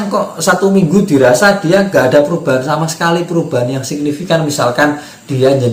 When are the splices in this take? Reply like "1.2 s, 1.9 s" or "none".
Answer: none